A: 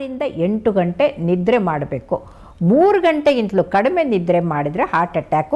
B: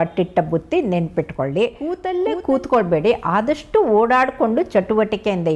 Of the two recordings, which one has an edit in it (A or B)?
B